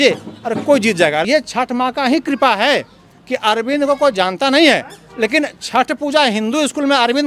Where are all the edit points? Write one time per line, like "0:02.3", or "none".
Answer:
0:01.2

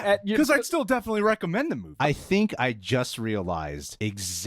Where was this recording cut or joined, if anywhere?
0:01.9

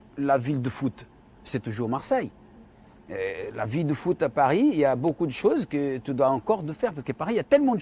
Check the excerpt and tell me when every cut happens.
0:02.2

